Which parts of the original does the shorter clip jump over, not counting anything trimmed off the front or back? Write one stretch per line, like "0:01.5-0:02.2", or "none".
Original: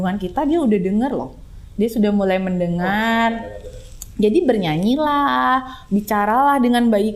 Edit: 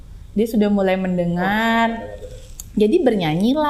none